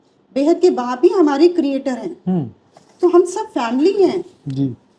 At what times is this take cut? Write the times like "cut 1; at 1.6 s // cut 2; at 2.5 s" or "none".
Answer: none